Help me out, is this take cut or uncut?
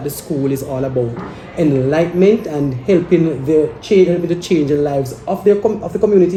uncut